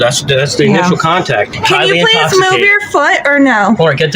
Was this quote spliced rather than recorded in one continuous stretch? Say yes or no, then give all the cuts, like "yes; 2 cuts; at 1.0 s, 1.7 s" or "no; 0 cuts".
yes; 1 cut; at 1.6 s